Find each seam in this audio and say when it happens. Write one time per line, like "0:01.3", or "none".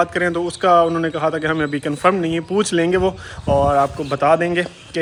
none